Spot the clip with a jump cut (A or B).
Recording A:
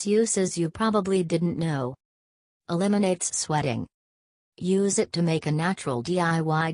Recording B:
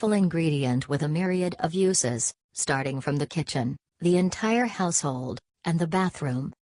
A